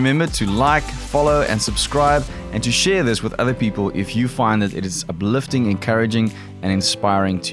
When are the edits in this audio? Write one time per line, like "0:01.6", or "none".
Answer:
none